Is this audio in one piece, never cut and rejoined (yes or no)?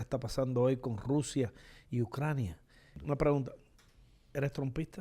no